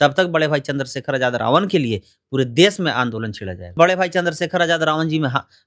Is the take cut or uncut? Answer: cut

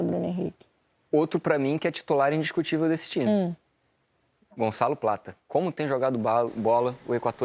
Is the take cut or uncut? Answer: uncut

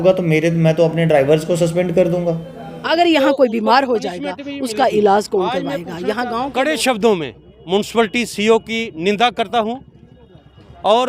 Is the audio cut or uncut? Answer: cut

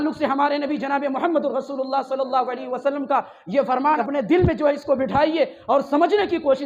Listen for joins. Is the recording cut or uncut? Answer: cut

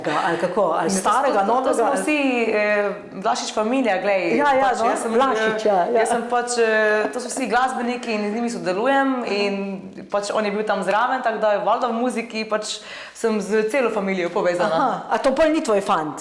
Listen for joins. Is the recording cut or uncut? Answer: uncut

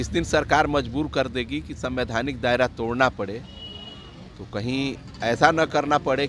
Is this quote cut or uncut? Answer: uncut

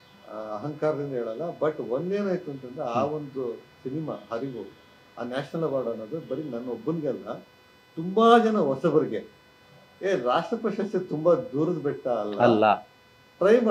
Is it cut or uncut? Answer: uncut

